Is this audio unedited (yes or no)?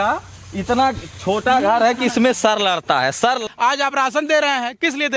no